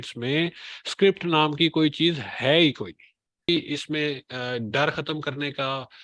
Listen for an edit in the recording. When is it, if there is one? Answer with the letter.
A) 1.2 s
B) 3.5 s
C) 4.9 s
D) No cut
B